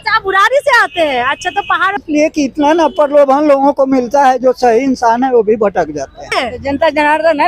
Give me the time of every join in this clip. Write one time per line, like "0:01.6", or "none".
0:02.0
0:06.3